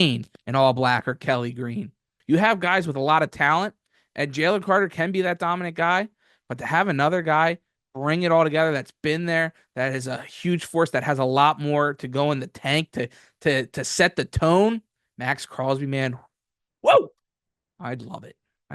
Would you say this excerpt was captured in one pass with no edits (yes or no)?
no